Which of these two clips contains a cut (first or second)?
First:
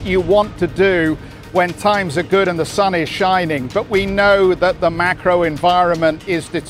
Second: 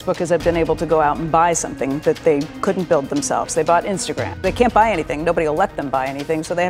second